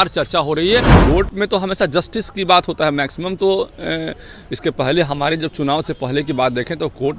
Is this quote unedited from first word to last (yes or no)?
no